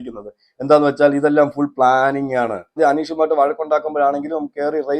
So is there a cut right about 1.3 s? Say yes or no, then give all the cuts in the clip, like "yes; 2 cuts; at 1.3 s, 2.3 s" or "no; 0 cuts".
no; 1 cut; at 2.7 s